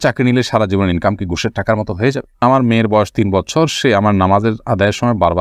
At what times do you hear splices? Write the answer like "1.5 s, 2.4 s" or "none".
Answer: 2.4 s